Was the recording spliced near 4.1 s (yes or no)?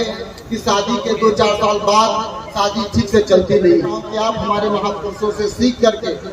yes